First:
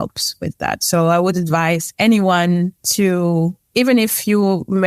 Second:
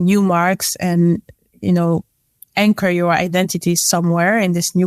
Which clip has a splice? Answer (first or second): first